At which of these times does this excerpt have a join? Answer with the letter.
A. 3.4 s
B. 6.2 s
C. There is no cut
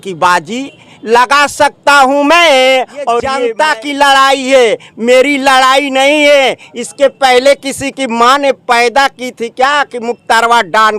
A